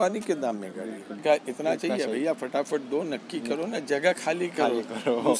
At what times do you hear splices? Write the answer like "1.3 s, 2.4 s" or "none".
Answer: 1.2 s

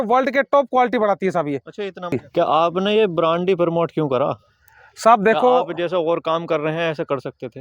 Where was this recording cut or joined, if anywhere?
2.2 s

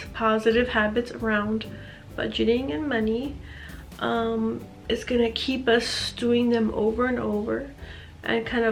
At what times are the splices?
none

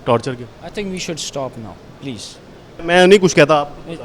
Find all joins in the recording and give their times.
2.8 s

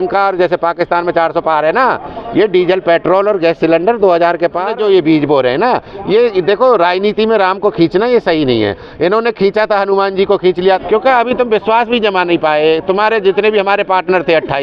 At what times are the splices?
4.7 s, 10.8 s

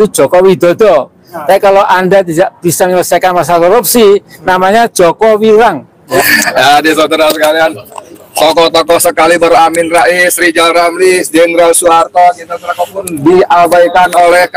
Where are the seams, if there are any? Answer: 6.2 s

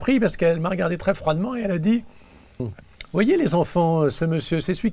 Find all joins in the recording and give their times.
2.7 s

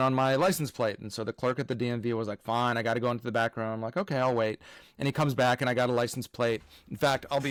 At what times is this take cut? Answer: none

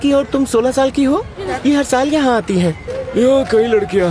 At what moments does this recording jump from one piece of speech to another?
1.4 s, 2.9 s

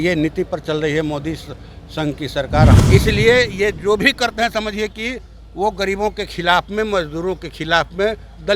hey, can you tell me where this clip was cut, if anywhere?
2.8 s

